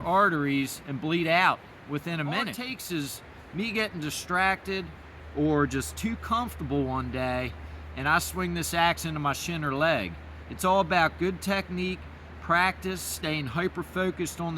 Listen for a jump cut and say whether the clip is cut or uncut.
cut